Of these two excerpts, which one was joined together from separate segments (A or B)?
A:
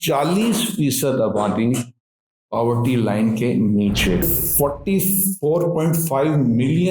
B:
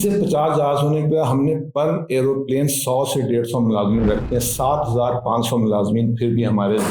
A